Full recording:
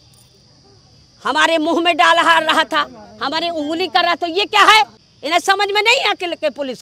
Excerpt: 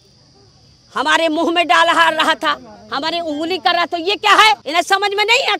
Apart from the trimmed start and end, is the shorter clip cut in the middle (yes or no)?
yes